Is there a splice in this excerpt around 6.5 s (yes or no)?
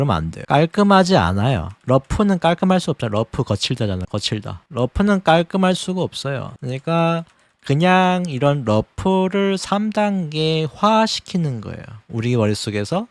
no